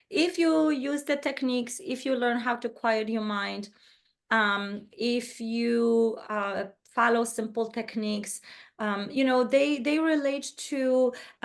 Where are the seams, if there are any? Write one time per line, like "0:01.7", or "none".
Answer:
none